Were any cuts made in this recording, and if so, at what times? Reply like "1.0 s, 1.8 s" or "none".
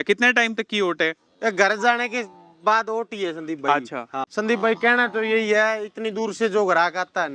4.3 s